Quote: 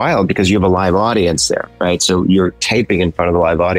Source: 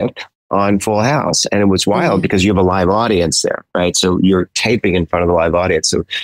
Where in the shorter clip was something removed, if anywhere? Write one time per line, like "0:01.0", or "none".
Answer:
none